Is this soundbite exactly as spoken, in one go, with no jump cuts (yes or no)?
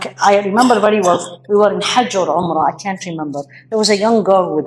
yes